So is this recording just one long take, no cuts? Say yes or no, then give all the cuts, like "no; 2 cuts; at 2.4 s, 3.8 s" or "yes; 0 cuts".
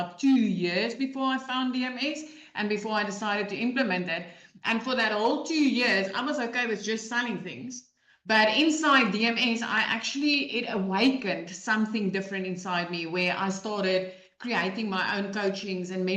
yes; 0 cuts